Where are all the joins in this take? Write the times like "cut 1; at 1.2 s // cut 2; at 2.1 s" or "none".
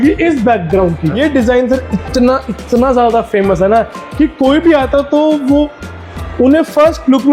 cut 1; at 1.1 s